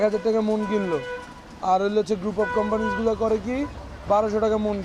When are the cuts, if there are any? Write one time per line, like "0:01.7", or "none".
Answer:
none